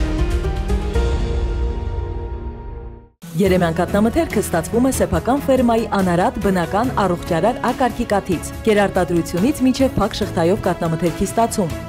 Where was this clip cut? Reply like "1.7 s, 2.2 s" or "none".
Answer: 3.1 s